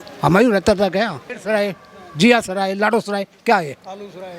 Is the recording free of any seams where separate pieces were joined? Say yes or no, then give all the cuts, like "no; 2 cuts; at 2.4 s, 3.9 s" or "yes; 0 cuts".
no; 1 cut; at 1.3 s